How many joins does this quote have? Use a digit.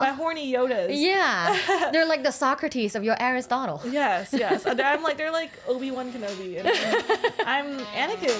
0